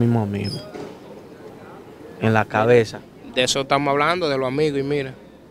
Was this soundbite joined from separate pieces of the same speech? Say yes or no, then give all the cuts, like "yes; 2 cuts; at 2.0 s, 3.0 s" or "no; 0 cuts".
no; 0 cuts